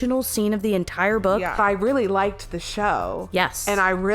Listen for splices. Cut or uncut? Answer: cut